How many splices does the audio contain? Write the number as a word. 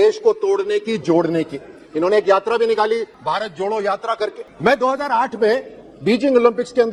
zero